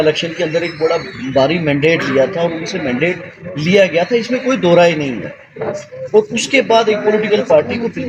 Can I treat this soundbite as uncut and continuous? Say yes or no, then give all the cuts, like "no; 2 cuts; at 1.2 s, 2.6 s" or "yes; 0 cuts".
yes; 0 cuts